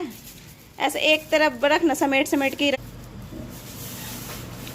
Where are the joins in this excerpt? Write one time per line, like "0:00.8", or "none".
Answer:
0:02.8